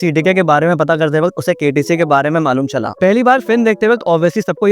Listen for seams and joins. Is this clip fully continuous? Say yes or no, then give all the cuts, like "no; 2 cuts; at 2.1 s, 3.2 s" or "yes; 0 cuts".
no; 1 cut; at 2.9 s